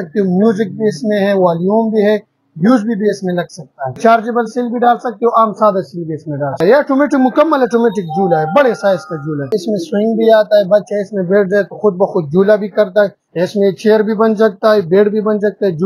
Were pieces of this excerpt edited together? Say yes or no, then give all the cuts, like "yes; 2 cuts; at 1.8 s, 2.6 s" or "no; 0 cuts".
yes; 4 cuts; at 3.9 s, 6.6 s, 9.5 s, 13.2 s